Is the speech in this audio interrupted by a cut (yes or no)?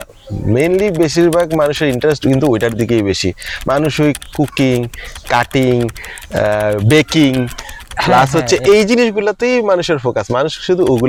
no